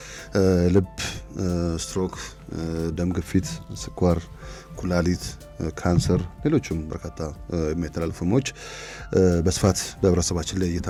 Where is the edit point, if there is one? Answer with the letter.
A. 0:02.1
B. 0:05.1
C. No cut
C